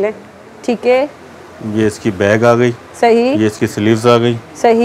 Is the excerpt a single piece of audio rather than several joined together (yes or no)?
yes